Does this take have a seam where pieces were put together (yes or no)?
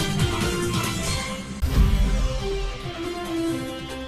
yes